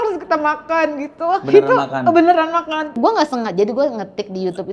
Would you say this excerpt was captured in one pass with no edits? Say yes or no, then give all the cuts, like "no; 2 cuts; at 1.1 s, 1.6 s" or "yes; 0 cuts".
no; 1 cut; at 3.0 s